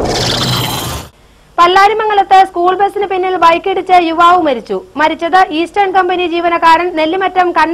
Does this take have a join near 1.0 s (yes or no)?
yes